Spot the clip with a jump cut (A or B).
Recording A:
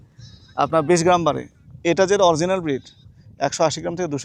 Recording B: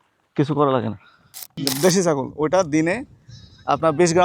B